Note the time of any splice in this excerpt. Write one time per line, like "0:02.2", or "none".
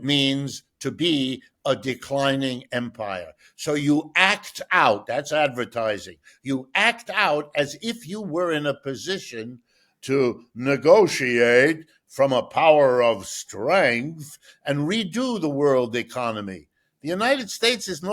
none